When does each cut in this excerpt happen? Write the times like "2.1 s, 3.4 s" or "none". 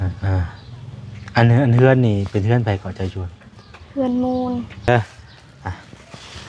4.9 s